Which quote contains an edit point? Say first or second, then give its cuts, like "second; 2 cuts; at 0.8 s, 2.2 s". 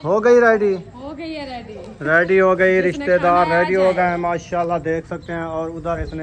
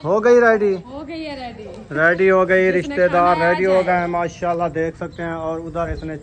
second; 1 cut; at 0.9 s